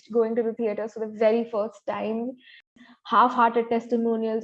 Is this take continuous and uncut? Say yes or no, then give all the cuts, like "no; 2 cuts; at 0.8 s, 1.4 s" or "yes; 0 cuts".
no; 1 cut; at 2.8 s